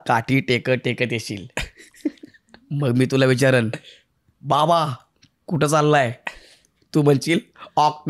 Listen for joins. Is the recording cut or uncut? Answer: uncut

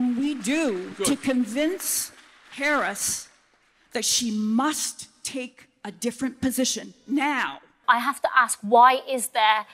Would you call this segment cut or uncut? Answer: cut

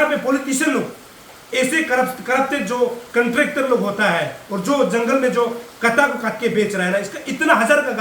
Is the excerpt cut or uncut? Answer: uncut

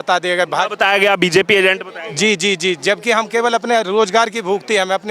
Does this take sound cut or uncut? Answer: uncut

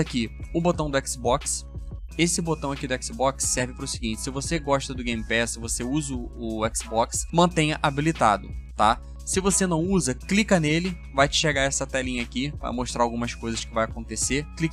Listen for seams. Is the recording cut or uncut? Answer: uncut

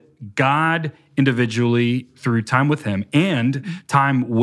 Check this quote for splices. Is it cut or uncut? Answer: cut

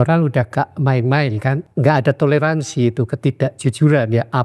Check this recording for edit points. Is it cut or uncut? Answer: cut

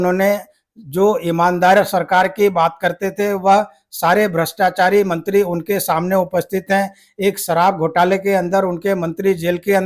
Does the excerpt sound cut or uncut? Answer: uncut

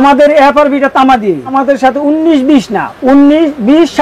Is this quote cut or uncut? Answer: cut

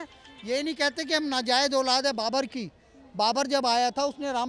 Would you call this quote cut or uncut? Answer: uncut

